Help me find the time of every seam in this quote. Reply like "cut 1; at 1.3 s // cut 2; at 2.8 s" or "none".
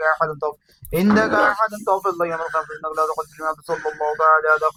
none